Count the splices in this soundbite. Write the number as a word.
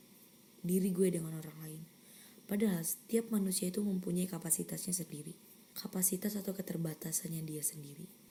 zero